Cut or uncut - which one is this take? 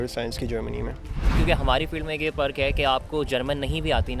cut